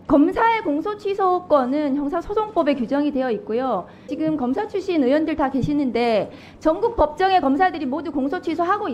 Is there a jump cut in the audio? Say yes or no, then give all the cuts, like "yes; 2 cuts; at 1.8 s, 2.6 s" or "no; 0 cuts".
yes; 1 cut; at 4.1 s